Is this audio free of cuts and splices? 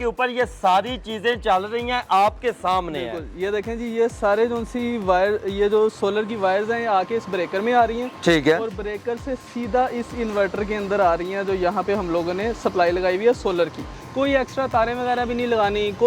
no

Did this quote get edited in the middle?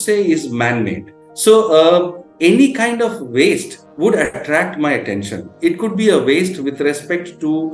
yes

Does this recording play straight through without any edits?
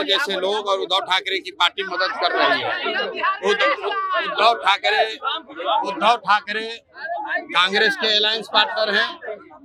yes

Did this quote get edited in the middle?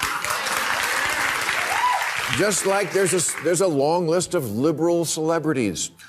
yes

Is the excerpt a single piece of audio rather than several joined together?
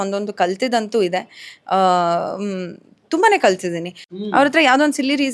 no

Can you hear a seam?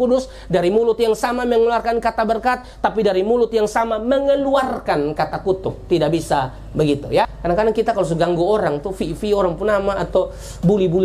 yes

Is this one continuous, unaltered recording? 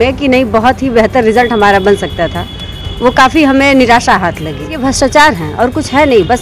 no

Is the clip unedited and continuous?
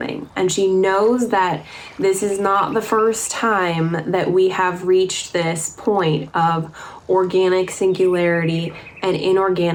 yes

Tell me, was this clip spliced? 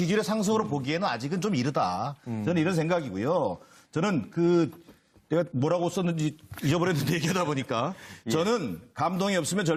no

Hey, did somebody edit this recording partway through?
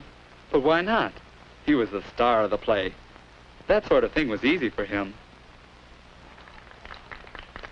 no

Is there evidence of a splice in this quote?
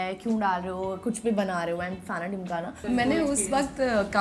yes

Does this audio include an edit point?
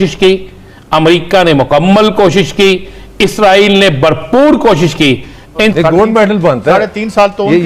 yes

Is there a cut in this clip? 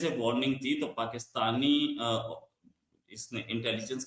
no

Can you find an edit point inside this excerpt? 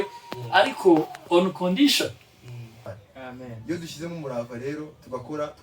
yes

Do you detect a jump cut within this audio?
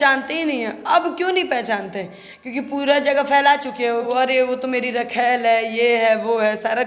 no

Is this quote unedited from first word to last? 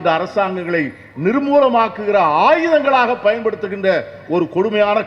yes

